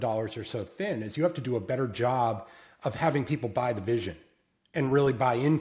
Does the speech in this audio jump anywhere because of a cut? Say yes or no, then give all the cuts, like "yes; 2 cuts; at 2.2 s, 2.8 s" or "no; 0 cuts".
no; 0 cuts